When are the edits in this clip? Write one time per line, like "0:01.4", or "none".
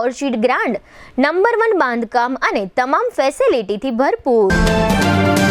0:04.5

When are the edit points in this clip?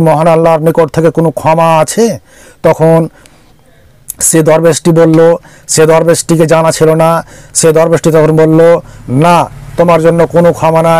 none

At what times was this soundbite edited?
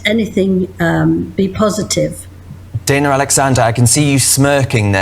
0:03.6

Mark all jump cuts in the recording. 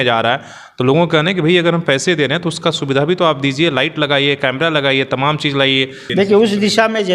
0:06.0

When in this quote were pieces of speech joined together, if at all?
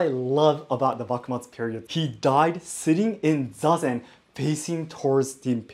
0:01.8

